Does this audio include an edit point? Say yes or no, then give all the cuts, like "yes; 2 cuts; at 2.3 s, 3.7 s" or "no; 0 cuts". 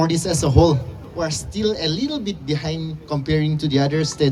no; 0 cuts